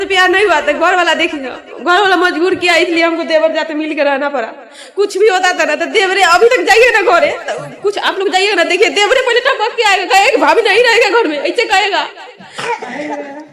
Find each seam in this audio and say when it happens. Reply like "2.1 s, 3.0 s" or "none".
none